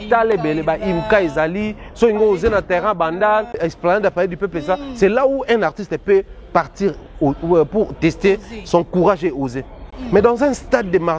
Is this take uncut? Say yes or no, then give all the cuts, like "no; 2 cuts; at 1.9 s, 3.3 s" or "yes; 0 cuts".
no; 1 cut; at 3.6 s